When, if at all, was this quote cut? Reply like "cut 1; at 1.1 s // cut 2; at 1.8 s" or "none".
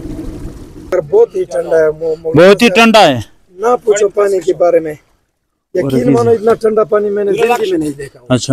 cut 1; at 0.9 s